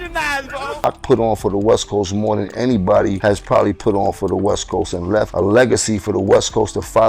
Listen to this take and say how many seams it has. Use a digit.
3